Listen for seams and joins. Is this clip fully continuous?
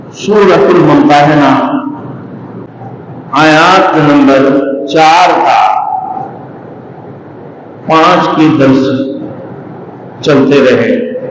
no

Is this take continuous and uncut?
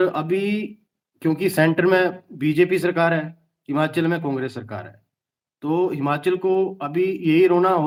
yes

